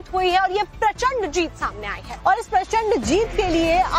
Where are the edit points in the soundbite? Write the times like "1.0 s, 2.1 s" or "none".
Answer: 1.5 s